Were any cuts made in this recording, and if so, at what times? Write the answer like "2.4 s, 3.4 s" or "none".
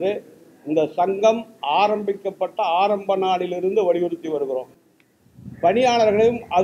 none